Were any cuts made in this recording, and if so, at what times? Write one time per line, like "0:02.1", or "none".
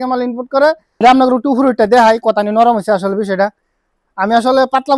0:01.0